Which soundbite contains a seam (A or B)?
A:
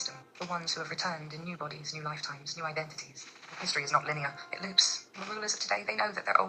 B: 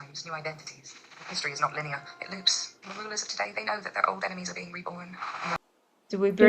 B